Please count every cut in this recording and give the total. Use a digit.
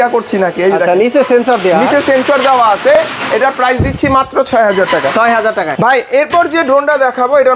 0